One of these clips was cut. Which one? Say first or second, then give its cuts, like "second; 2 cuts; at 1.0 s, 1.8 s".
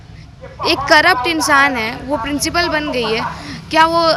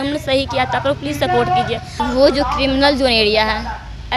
second; 1 cut; at 2.0 s